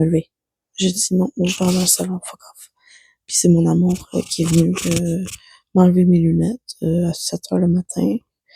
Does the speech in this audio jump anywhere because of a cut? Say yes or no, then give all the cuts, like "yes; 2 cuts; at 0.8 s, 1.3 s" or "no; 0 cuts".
no; 0 cuts